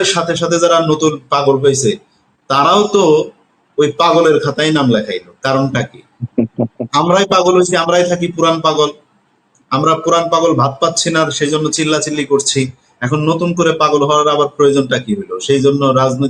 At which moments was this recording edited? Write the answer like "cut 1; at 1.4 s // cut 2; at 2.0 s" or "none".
none